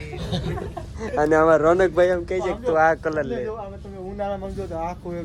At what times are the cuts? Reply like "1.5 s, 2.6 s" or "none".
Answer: none

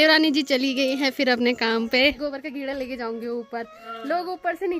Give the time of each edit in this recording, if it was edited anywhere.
2.2 s

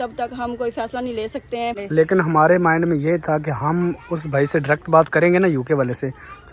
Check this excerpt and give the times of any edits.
1.8 s

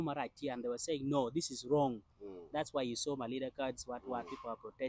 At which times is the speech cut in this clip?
none

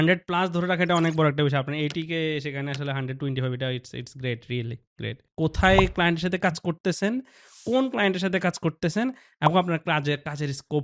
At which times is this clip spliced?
5.2 s

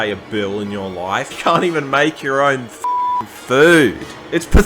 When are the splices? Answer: 1.3 s

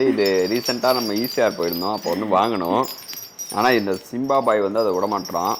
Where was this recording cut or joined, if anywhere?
none

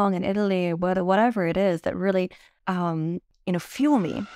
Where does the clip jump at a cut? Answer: 2.5 s, 3.3 s

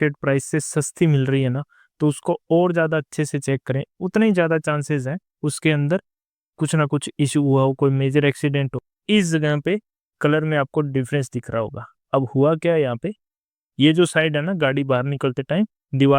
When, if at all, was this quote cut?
8.9 s

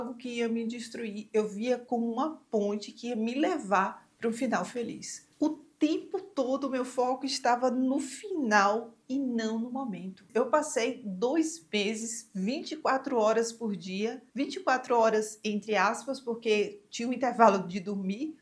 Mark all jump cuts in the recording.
none

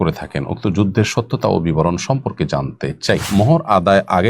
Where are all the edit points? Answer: 3.3 s

